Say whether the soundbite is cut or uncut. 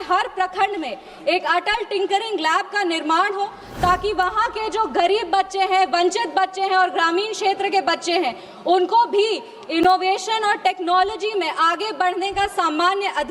uncut